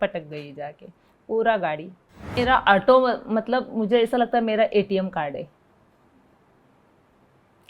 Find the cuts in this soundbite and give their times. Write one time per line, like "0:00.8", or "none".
0:02.4